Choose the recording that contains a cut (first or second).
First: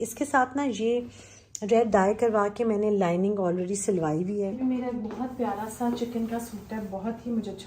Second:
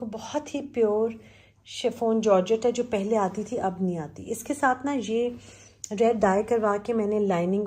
first